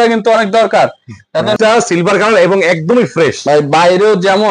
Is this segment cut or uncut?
cut